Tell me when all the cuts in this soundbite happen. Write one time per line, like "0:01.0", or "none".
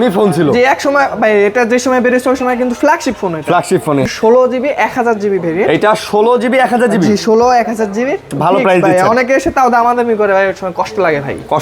0:04.1
0:08.3